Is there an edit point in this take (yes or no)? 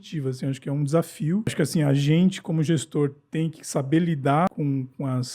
yes